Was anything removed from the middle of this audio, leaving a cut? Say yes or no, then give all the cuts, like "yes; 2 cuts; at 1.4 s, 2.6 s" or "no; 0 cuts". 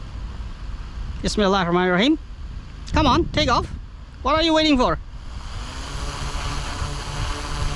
no; 0 cuts